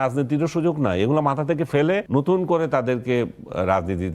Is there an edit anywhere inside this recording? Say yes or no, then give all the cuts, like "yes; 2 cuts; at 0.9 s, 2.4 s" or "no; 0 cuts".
yes; 1 cut; at 2.0 s